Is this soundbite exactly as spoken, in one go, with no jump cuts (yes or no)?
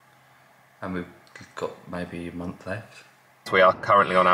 no